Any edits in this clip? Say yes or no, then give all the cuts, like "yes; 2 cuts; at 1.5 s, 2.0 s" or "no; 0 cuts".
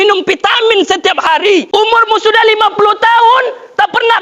yes; 1 cut; at 1.7 s